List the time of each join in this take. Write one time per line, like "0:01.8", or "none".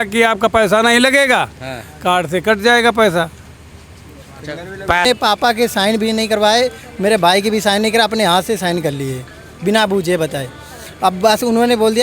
0:05.1